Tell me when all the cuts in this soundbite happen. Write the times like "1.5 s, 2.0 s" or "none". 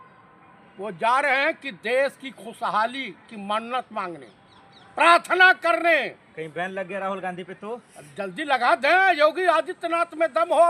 none

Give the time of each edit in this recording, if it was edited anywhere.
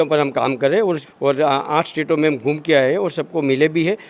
1.1 s

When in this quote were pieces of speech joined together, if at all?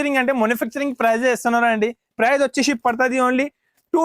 2.1 s

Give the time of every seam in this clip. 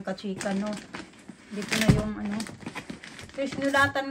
none

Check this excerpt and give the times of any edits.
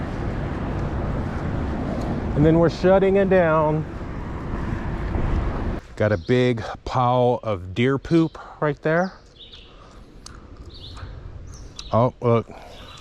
5.9 s

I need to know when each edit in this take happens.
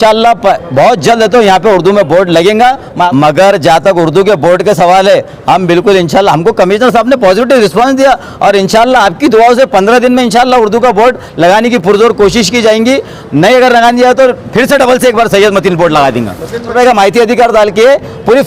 3.1 s, 16.7 s

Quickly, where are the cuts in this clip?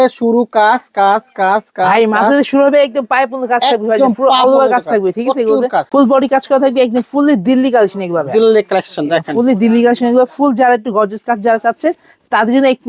5.9 s

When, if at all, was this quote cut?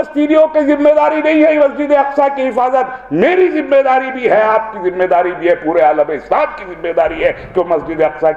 none

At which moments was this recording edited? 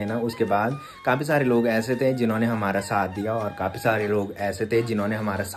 none

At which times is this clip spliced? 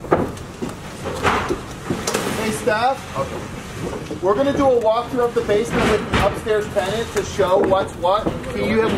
none

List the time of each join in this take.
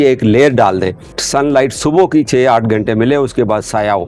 1.2 s

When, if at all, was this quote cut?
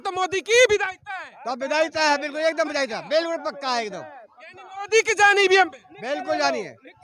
none

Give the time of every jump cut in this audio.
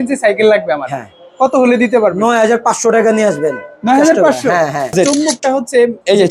5.2 s

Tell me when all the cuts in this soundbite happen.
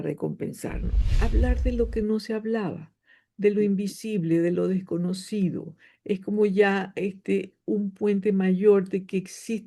1.2 s

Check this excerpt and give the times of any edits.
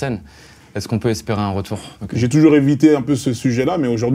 1.9 s

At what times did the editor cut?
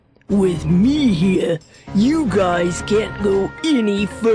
none

